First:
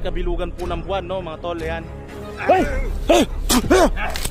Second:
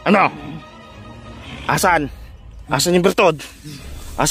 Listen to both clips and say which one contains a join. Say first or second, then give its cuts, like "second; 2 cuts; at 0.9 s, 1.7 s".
first; 1 cut; at 3.1 s